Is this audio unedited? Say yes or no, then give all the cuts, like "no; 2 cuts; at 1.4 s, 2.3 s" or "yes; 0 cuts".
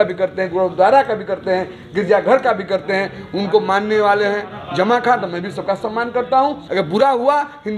no; 1 cut; at 6.6 s